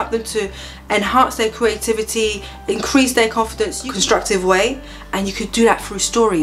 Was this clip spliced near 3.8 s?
yes; 1 cut; at 3.8 s

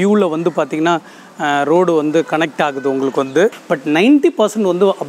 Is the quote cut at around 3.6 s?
yes; 1 cut; at 3.6 s

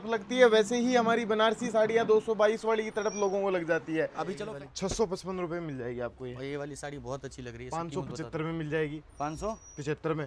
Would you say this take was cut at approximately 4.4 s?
yes; 1 cut; at 4.4 s

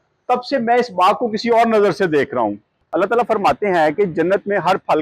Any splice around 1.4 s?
no; 1 cut; at 2.8 s

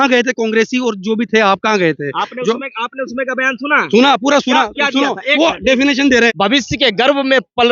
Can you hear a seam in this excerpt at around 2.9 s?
no; 1 cut; at 6.3 s

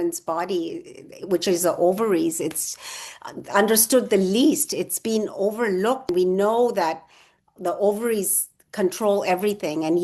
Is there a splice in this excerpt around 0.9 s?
no; 1 cut; at 6.1 s

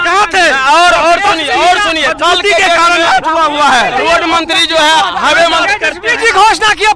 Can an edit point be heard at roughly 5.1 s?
no; 0 cuts

